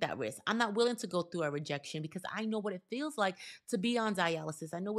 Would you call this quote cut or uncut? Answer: uncut